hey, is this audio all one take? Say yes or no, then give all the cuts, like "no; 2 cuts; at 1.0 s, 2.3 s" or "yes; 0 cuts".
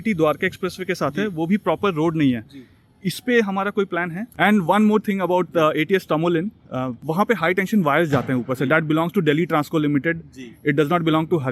no; 1 cut; at 4.2 s